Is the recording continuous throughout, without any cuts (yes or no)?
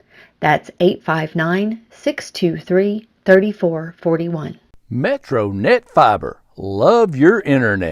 no